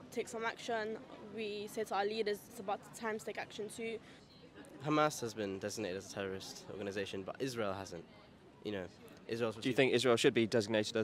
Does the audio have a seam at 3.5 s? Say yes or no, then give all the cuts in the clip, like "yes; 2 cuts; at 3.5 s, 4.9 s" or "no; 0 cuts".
no; 0 cuts